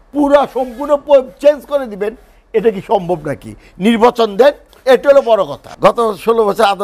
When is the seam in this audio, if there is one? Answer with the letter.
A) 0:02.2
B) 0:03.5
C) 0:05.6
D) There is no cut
C